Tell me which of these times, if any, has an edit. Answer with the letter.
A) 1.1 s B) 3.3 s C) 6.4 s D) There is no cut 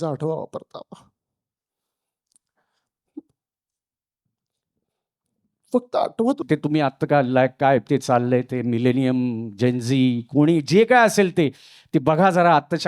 C